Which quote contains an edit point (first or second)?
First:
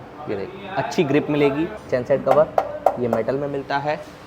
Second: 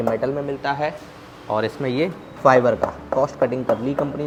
first